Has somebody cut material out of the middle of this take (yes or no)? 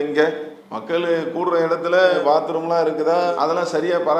no